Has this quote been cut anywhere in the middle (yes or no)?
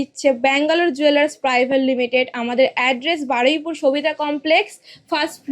no